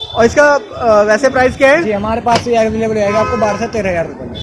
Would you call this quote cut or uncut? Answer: uncut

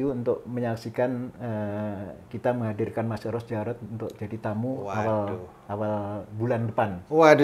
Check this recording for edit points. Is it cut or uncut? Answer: uncut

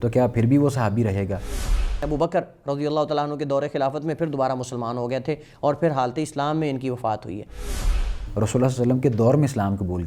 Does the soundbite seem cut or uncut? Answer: cut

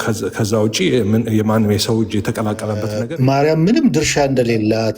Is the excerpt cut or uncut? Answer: cut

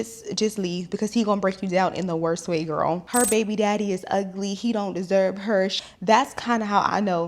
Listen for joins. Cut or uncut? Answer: cut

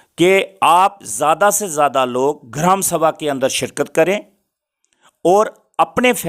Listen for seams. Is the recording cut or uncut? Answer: uncut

